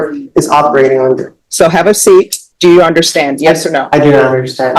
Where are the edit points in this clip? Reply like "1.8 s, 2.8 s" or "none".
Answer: 1.4 s, 2.4 s